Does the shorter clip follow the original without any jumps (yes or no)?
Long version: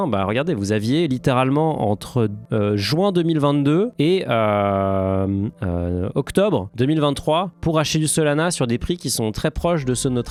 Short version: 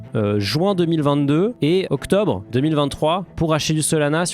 no